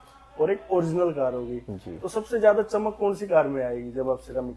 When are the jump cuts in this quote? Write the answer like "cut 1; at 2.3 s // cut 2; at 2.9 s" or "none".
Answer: none